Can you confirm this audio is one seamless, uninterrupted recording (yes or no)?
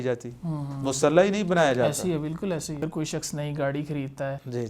no